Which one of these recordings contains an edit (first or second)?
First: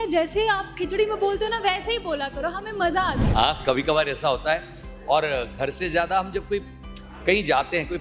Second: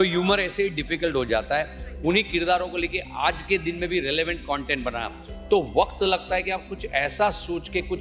first